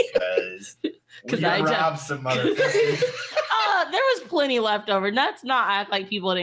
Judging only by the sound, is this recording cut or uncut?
uncut